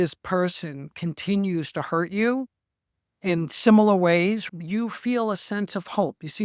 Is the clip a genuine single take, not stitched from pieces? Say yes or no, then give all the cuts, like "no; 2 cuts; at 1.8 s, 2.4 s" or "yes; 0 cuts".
yes; 0 cuts